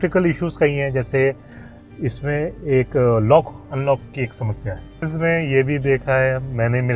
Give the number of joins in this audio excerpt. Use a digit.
1